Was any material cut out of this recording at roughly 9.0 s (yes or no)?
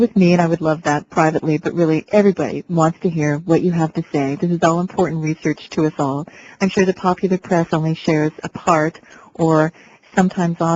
yes